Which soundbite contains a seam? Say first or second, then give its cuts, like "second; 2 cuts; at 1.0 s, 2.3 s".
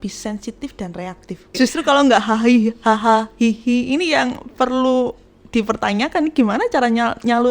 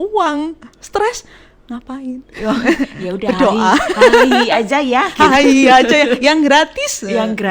first; 1 cut; at 1.5 s